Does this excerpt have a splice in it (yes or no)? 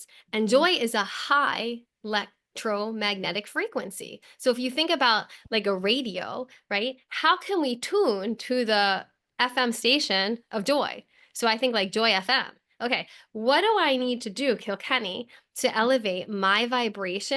no